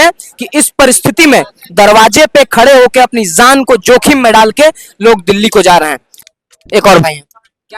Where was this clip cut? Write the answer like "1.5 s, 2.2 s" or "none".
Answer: none

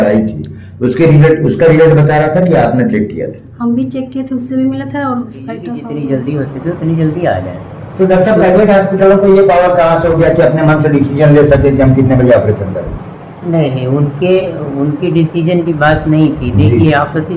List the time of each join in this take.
5.8 s

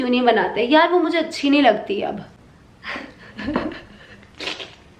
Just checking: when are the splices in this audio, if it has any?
none

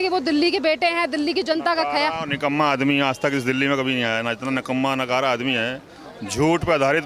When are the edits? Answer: none

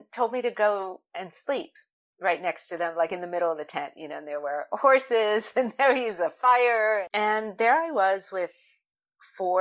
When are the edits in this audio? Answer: 7.1 s

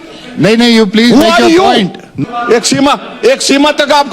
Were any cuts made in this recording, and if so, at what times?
2.1 s

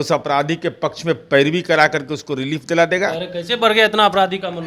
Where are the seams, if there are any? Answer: none

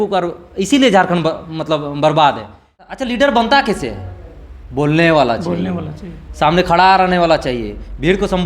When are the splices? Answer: 3.0 s

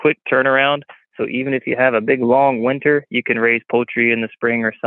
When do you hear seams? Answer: none

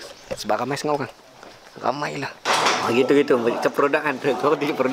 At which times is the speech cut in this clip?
2.4 s

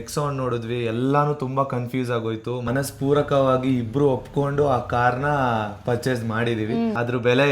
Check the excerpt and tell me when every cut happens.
2.7 s

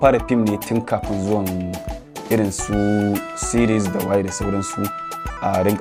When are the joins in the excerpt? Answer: none

